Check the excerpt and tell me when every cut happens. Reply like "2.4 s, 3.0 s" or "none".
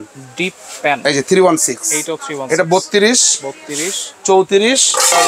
none